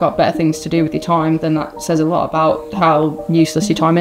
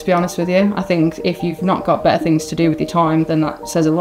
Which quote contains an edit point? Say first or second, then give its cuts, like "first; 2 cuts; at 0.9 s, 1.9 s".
first; 1 cut; at 3.1 s